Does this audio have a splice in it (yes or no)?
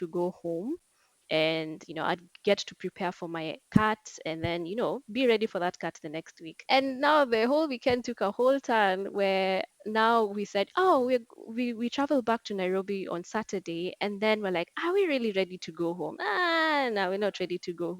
no